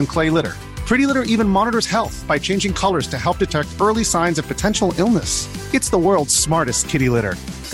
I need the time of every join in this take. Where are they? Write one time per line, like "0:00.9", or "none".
none